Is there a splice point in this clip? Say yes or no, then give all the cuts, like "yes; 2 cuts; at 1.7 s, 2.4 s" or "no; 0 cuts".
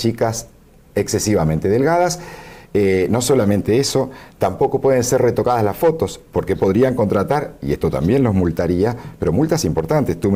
no; 0 cuts